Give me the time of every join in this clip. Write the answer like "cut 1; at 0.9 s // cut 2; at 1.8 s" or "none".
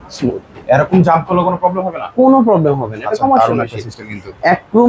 none

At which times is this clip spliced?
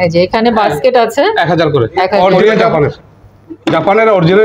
cut 1; at 3.1 s

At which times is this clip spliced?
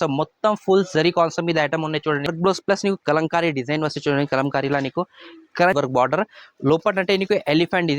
cut 1; at 2.3 s // cut 2; at 5.7 s

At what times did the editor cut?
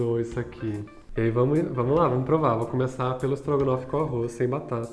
cut 1; at 1.0 s

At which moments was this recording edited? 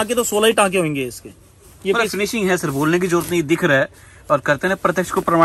none

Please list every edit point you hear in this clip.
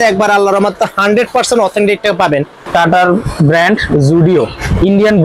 cut 1; at 2.6 s

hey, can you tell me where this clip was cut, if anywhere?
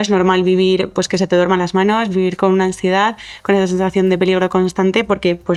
none

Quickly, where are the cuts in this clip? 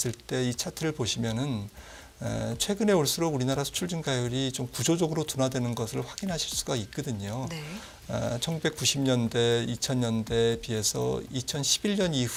none

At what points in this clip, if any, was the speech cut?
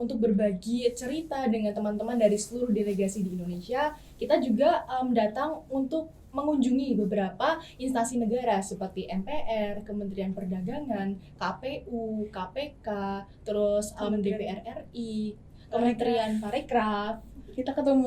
none

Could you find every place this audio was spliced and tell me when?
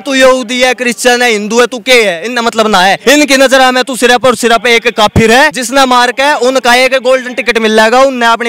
cut 1; at 3.0 s // cut 2; at 5.6 s

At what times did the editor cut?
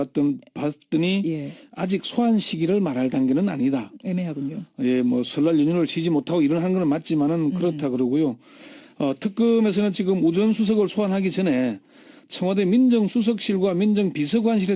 none

